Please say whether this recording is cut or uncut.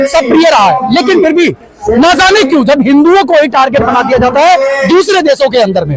uncut